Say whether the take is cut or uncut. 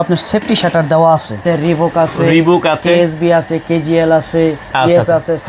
cut